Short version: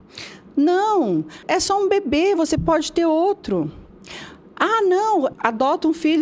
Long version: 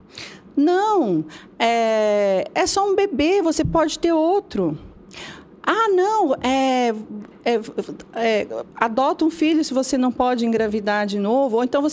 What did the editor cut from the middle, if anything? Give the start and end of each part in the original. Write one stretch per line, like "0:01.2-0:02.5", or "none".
0:01.4-0:02.5
0:06.4-0:08.7